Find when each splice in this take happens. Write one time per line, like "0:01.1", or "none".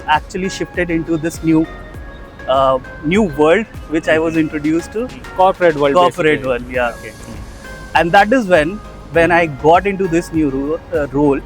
none